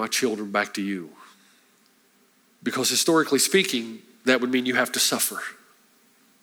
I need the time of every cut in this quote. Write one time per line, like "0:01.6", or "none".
0:02.5

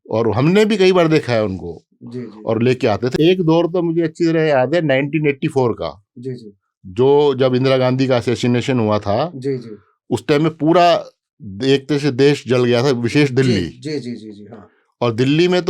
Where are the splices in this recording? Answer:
0:03.1

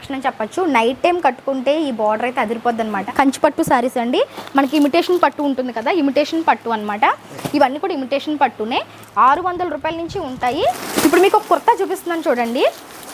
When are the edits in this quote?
0:03.0
0:09.0
0:10.7

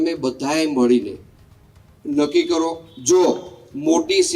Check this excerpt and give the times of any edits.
0:02.9

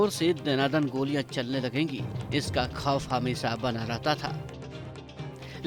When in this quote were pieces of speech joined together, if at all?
none

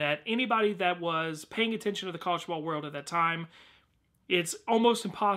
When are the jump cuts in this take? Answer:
0:02.6

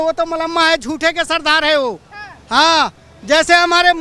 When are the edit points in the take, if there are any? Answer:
none

